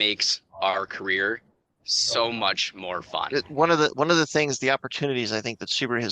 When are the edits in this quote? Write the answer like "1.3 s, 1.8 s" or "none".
3.3 s